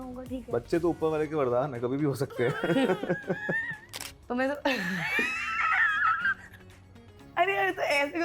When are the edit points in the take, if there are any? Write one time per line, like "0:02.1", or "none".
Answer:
0:03.9
0:07.2

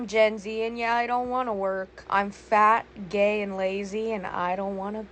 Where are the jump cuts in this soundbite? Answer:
0:01.9

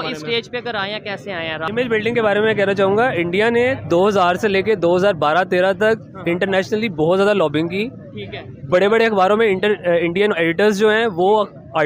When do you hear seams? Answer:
0:01.6

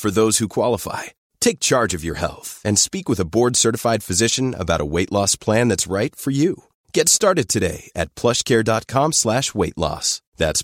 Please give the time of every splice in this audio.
none

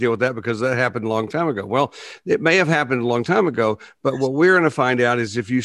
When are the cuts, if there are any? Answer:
none

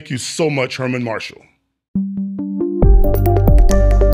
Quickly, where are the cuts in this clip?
0:01.9

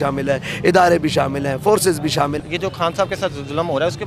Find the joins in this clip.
0:02.4

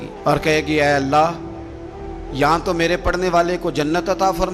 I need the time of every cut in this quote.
none

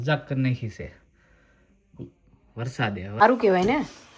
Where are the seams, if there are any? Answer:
0:03.2

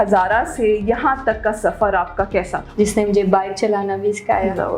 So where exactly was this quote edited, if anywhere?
0:02.6

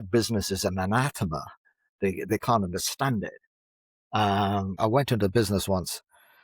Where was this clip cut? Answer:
0:04.8

